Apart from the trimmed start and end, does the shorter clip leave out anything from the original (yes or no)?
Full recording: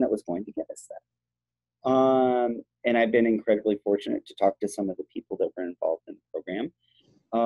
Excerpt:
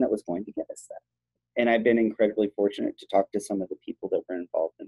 yes